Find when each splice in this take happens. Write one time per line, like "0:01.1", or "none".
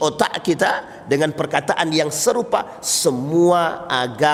none